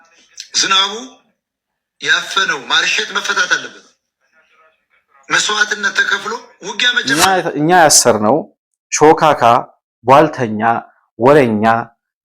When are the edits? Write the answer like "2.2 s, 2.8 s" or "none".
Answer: 7.2 s